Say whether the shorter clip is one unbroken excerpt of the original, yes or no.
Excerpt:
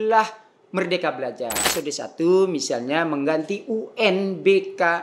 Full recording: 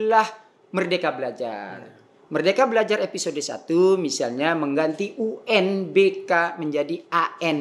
no